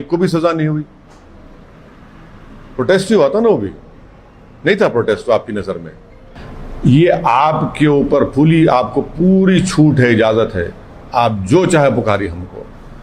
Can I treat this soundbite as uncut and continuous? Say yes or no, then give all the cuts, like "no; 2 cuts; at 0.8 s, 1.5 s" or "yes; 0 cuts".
yes; 0 cuts